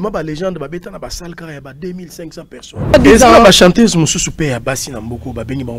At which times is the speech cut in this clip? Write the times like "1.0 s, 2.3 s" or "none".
2.9 s